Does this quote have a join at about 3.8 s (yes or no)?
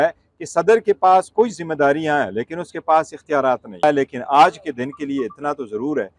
yes